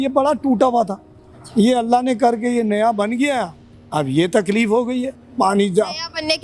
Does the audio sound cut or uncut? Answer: uncut